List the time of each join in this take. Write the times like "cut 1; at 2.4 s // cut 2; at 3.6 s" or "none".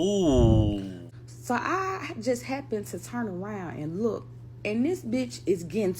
cut 1; at 1.0 s